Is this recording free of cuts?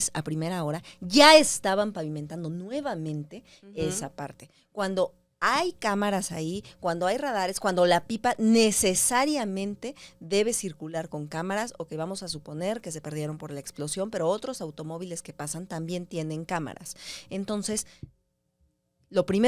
yes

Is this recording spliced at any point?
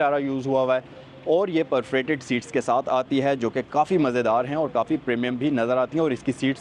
no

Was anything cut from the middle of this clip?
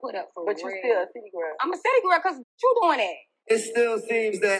yes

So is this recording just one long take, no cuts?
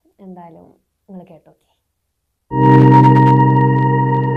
yes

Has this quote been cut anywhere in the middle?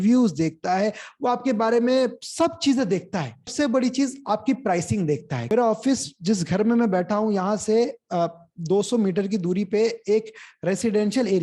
yes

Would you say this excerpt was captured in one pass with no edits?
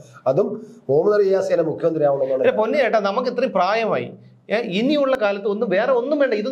yes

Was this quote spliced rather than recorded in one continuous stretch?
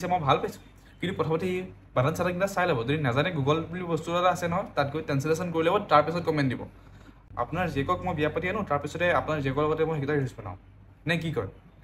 yes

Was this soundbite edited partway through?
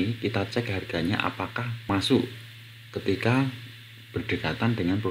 yes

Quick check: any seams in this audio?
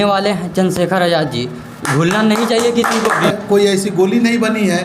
yes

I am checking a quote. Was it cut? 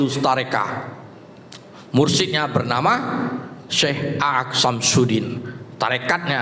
no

